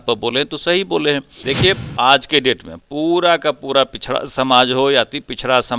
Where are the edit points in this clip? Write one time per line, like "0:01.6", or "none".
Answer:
0:01.3

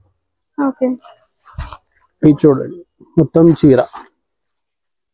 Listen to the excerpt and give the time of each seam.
none

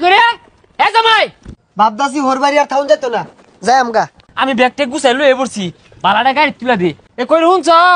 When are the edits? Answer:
0:01.5
0:04.2
0:07.0

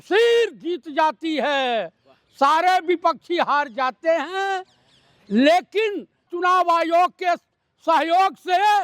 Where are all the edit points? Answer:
0:06.3

